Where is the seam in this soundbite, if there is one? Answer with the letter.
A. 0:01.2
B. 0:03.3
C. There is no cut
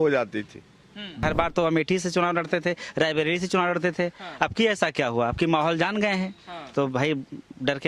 A